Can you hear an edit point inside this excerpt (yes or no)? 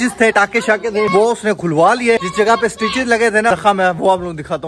no